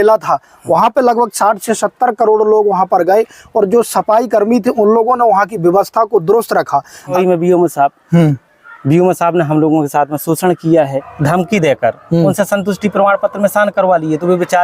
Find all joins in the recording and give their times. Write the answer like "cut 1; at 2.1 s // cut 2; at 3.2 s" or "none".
cut 1; at 7.1 s // cut 2; at 11.0 s